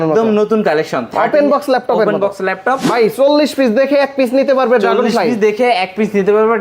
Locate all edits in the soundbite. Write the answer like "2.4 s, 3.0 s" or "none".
2.9 s